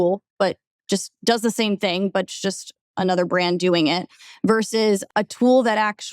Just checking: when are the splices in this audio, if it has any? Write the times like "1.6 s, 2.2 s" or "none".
5.0 s